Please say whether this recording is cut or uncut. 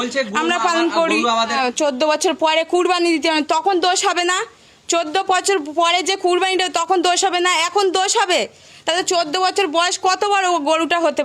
cut